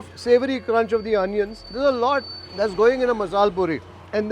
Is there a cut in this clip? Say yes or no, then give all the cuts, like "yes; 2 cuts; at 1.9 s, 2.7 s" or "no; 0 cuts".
yes; 2 cuts; at 1.7 s, 2.4 s